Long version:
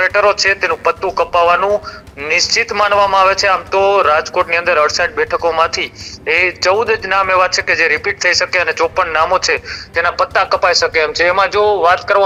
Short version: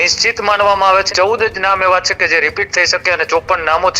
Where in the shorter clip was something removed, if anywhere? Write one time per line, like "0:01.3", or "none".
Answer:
0:01.1